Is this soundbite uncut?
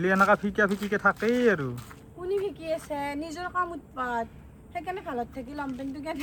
yes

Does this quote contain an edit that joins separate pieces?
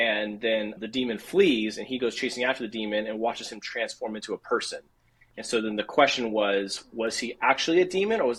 no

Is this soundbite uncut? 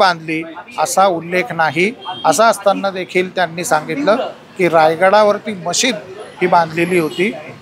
yes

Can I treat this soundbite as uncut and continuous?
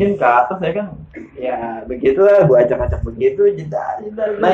yes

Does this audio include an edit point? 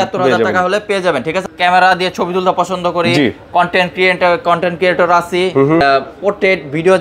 yes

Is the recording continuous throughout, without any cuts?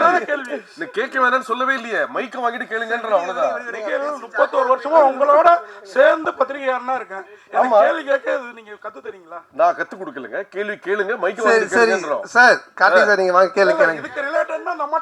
yes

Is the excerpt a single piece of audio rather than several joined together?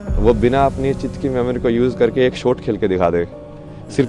yes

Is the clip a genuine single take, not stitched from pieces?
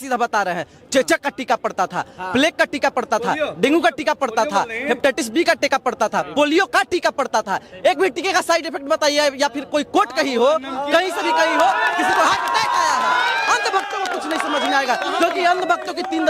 yes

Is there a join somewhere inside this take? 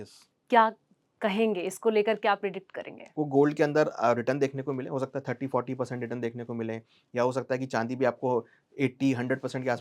yes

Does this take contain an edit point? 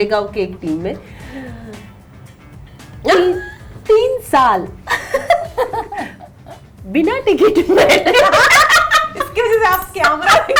no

